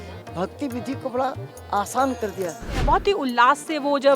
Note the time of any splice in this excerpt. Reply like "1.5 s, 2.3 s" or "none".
2.7 s